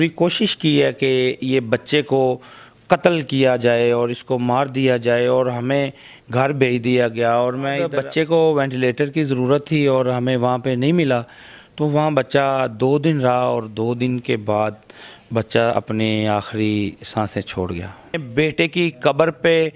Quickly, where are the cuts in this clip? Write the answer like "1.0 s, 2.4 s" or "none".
7.9 s, 18.2 s